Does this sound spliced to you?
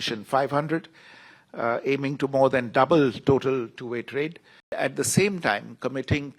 yes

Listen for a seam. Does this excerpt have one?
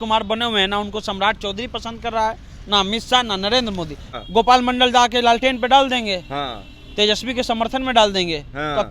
yes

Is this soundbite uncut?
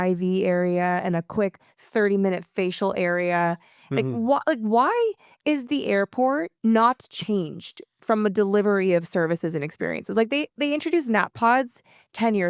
yes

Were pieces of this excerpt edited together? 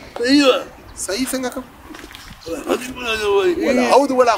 no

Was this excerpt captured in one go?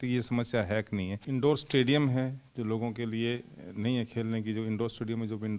no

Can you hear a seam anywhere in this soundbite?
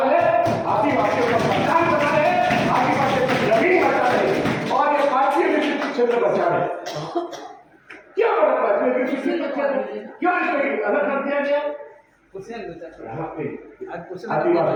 no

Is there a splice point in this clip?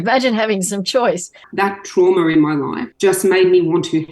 yes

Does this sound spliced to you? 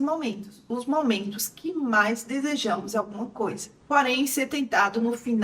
no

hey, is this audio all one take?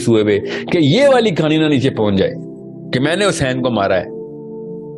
no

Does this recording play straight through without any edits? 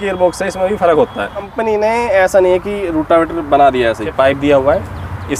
no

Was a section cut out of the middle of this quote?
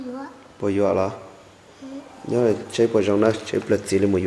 no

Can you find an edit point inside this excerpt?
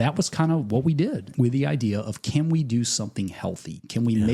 yes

